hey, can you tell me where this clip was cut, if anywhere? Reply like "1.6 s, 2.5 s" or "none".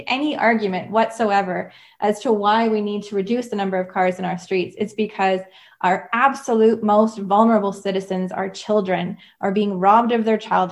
none